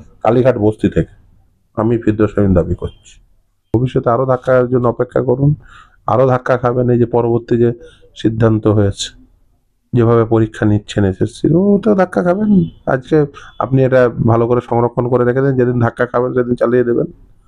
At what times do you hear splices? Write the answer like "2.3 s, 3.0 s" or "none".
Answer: 3.7 s